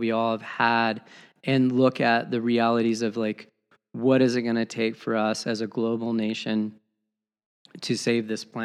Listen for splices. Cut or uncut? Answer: uncut